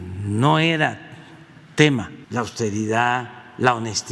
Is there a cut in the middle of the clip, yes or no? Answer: yes